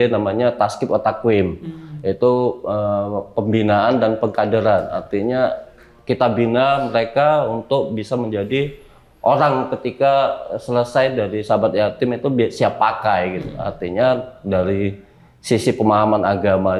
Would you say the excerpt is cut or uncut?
uncut